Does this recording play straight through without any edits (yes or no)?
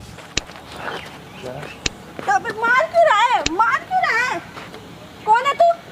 yes